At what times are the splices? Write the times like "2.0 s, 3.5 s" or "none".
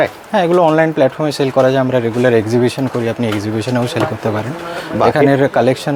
none